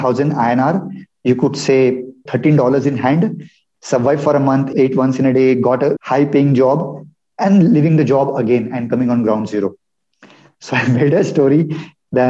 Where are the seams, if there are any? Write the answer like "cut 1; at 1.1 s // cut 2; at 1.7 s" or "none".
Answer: cut 1; at 2.2 s // cut 2; at 4.7 s // cut 3; at 6.0 s